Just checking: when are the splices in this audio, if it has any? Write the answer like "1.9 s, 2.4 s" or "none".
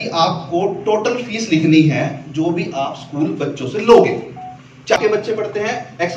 5.0 s